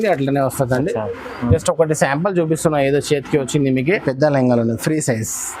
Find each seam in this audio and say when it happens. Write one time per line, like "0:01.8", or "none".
0:03.8